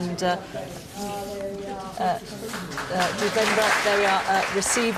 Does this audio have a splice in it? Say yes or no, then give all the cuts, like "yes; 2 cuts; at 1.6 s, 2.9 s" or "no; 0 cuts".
no; 0 cuts